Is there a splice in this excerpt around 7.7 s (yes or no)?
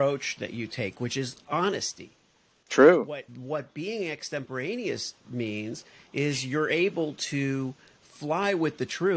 no